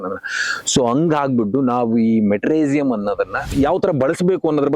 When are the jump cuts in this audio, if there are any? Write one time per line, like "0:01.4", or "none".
0:03.5